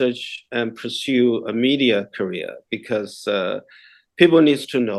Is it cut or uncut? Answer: uncut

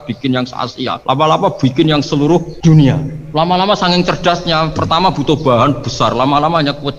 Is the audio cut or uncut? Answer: cut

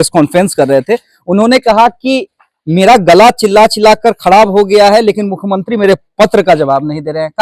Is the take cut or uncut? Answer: uncut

